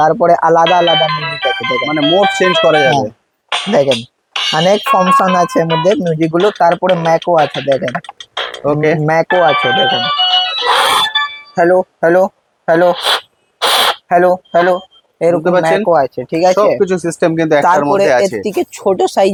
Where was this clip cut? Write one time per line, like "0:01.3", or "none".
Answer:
none